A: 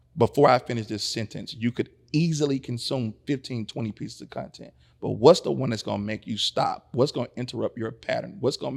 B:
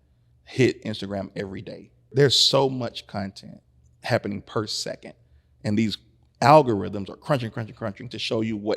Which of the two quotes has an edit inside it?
B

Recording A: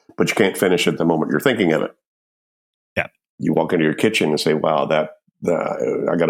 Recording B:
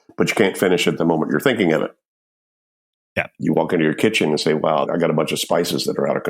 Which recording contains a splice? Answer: B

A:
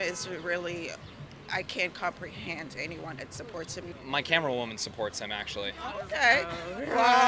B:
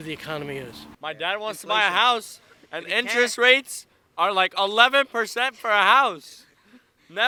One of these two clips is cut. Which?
A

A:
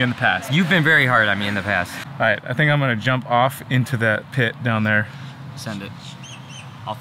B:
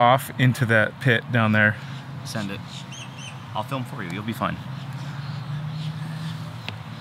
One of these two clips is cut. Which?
A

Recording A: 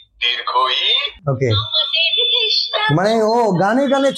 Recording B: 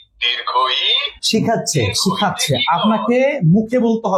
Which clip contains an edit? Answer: A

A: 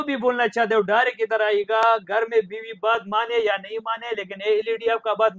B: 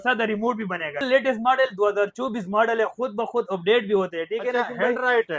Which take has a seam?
B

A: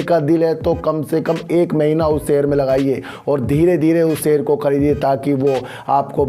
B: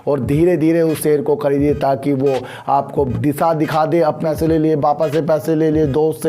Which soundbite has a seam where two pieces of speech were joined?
B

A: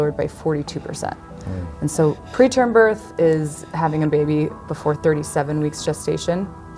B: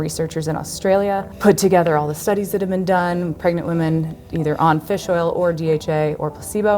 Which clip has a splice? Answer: B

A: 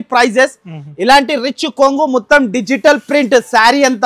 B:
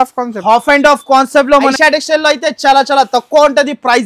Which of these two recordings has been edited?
B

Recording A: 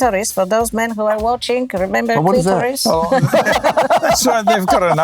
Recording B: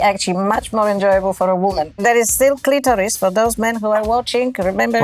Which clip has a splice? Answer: B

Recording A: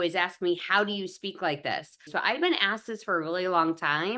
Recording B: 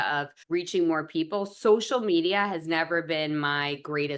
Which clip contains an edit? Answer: A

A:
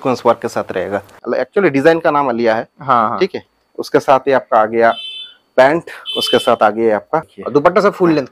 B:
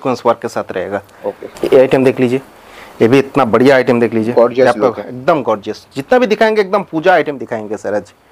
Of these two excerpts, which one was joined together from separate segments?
A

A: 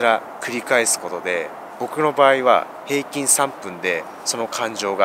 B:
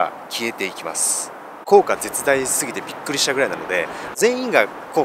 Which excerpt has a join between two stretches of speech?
B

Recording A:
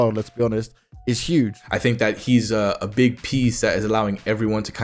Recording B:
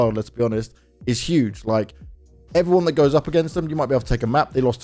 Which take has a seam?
A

